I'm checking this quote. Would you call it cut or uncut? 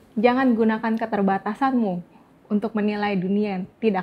uncut